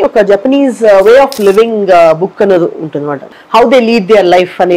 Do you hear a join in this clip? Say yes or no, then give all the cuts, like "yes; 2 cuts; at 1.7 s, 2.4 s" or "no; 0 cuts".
yes; 1 cut; at 3.3 s